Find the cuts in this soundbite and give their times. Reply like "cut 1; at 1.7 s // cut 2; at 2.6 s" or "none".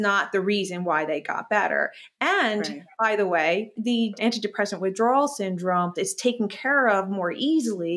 cut 1; at 4.0 s // cut 2; at 5.9 s